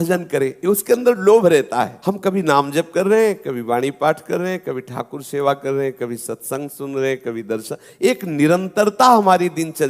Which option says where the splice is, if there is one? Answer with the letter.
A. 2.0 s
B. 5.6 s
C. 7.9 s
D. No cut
A